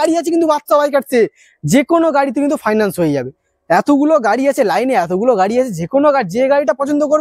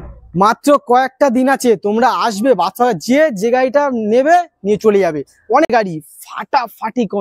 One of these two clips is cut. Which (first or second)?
second